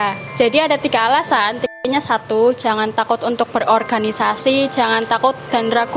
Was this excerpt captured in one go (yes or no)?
no